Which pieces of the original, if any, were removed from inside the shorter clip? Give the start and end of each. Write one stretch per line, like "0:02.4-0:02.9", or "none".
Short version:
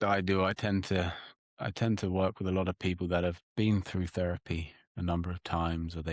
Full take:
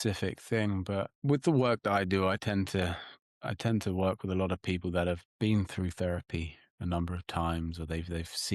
none